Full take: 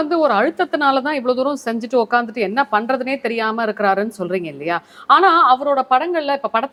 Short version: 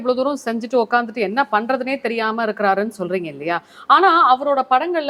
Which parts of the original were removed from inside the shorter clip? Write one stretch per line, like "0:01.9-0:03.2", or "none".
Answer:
none